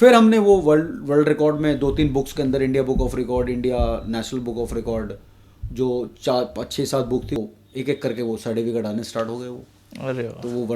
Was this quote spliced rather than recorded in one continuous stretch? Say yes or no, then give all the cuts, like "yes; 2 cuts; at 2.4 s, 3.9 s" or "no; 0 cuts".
yes; 1 cut; at 7.4 s